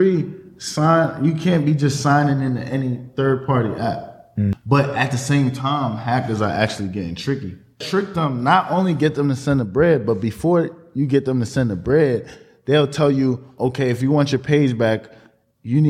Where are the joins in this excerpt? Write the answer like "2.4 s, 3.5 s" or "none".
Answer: 4.5 s, 7.8 s